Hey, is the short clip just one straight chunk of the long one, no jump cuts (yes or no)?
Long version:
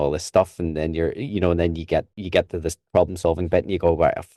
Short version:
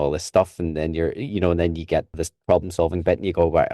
no